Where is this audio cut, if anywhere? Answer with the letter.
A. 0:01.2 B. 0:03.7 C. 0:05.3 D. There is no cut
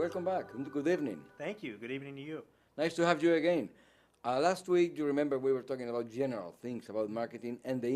C